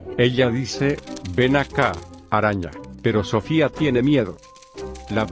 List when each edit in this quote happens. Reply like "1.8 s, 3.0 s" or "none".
1.0 s